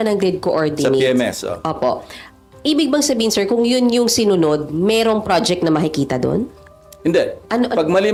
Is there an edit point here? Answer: no; 0 cuts

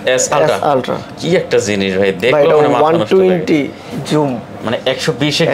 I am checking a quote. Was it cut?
no; 0 cuts

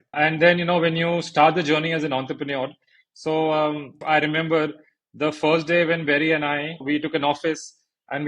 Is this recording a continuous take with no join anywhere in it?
no; 1 cut; at 4.0 s

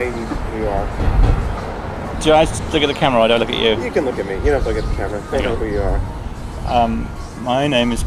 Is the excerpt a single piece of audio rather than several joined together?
yes; 0 cuts

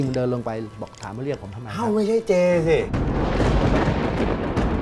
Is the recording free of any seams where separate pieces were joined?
yes; 0 cuts

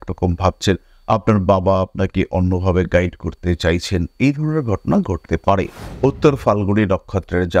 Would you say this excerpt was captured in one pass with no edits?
no; 1 cut; at 5.8 s

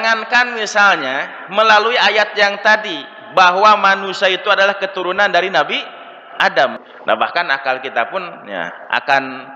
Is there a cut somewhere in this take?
yes; 1 cut; at 6.8 s

